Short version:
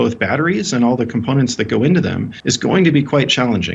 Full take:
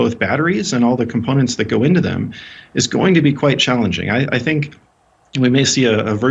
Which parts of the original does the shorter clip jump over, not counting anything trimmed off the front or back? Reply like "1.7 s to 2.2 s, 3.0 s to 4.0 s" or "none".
2.3 s to 2.6 s